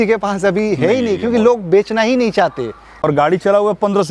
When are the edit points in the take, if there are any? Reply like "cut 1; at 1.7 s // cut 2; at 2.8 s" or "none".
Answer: cut 1; at 2.9 s